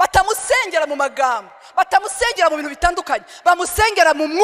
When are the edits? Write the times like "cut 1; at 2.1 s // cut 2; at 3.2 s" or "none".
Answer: none